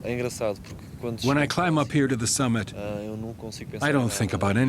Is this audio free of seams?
no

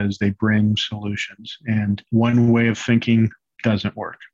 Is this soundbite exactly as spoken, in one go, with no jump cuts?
no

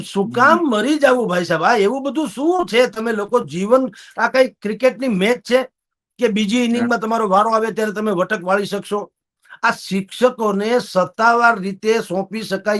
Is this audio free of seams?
no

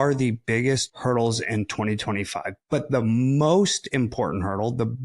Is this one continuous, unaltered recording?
no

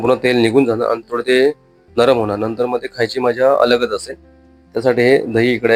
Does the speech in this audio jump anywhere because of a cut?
no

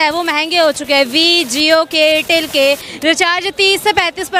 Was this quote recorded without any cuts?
yes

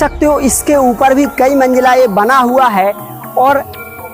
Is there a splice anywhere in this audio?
no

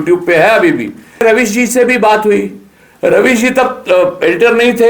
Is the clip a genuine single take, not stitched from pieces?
no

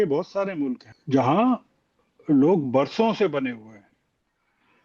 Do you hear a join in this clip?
yes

